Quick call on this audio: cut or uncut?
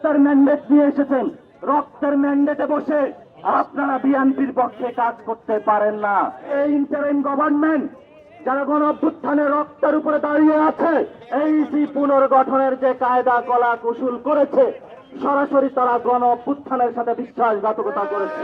cut